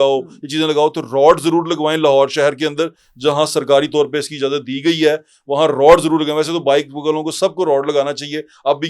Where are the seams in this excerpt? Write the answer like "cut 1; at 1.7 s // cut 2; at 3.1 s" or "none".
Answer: none

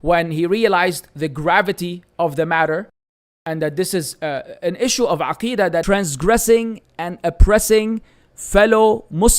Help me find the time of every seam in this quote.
cut 1; at 5.8 s

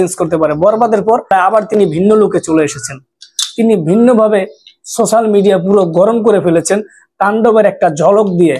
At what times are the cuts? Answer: cut 1; at 1.3 s

